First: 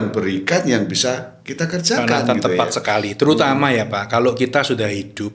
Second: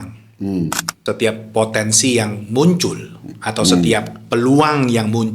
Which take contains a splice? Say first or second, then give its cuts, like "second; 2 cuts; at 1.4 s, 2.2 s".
second; 1 cut; at 0.9 s